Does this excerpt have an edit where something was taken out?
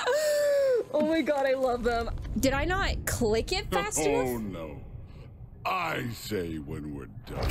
yes; 1 cut; at 2.1 s

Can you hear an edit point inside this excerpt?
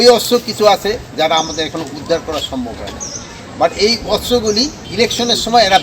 yes; 1 cut; at 4.8 s

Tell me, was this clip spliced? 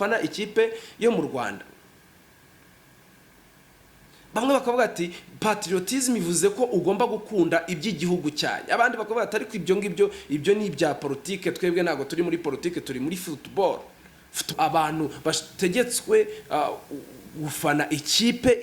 yes; 1 cut; at 14.5 s

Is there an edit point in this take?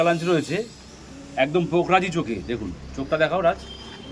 no; 0 cuts

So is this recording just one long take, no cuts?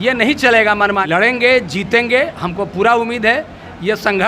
no; 1 cut; at 1.0 s

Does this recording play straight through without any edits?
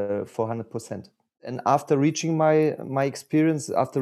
no; 1 cut; at 1.5 s

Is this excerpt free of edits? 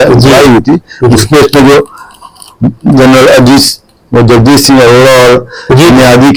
yes; 0 cuts

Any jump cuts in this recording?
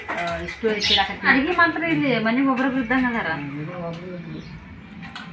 yes; 1 cut; at 1.3 s

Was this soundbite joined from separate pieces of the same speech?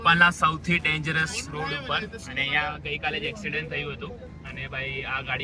no; 0 cuts

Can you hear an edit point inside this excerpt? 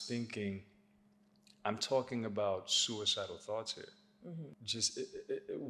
yes; 1 cut; at 4.6 s

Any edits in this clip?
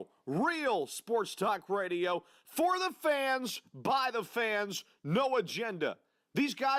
no; 0 cuts

